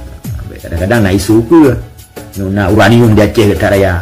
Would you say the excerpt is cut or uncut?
uncut